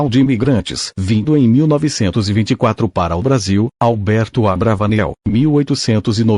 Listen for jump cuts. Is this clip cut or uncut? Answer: cut